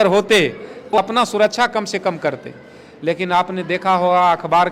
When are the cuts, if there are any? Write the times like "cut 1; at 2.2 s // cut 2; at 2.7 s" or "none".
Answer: cut 1; at 1.0 s

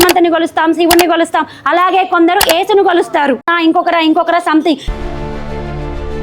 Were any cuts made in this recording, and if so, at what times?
cut 1; at 3.5 s

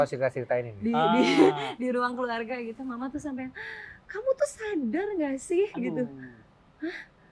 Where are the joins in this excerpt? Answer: none

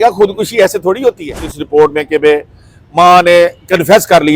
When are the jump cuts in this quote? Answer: cut 1; at 1.6 s

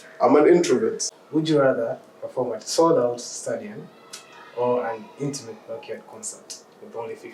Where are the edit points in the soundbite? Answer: cut 1; at 1.1 s

